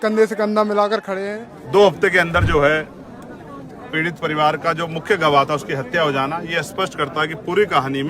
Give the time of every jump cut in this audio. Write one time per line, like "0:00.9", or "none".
0:01.2